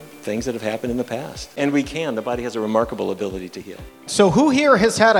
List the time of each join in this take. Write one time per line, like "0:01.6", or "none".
0:01.6
0:04.0